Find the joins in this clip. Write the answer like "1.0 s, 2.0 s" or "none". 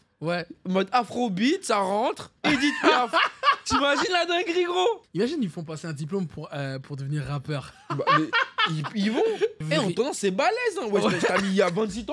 5.0 s, 9.6 s